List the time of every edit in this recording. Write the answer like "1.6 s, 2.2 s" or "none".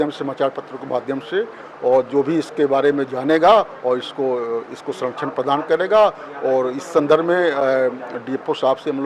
none